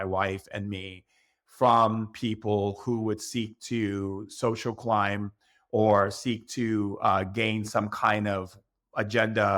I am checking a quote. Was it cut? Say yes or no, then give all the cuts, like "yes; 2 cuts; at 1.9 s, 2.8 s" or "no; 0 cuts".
no; 0 cuts